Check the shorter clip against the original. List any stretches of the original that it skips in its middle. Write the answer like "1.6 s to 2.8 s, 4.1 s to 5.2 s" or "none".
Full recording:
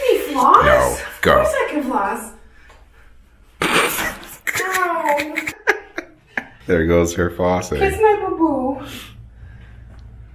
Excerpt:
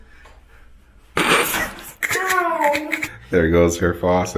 5.5 s to 6.4 s